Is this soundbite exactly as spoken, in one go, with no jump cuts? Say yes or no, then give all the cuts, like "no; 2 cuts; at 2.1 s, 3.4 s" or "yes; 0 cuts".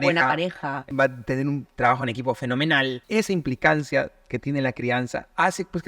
no; 2 cuts; at 0.9 s, 3.0 s